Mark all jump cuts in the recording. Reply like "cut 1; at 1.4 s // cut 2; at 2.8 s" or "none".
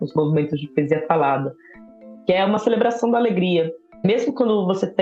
none